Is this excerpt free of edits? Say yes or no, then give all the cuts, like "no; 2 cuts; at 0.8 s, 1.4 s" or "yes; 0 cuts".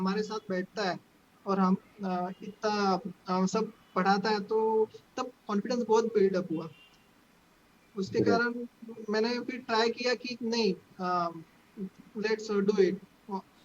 yes; 0 cuts